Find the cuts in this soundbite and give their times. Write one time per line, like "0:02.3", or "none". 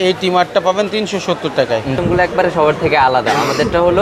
0:02.0